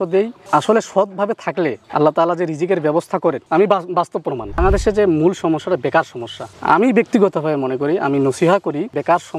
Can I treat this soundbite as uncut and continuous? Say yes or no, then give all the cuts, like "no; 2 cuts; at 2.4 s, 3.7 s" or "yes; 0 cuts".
no; 2 cuts; at 3.4 s, 4.6 s